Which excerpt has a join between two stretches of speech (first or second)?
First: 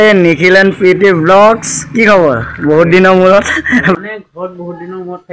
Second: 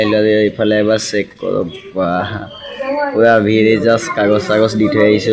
first